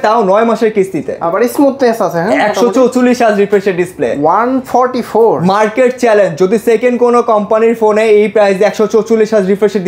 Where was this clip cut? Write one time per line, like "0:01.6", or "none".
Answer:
0:01.2